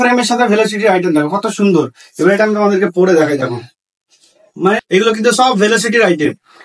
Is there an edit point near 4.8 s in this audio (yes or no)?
yes